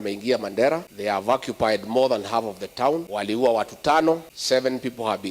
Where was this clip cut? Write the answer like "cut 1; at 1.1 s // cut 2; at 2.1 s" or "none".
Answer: cut 1; at 0.9 s // cut 2; at 3.1 s // cut 3; at 4.3 s